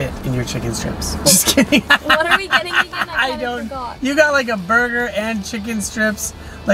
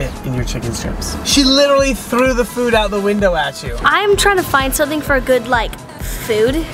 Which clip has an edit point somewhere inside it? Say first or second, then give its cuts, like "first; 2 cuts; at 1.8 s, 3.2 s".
second; 2 cuts; at 1.2 s, 3.8 s